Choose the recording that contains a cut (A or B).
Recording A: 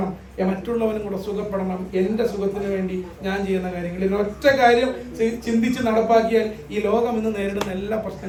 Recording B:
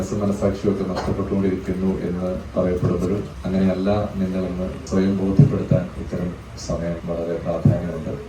B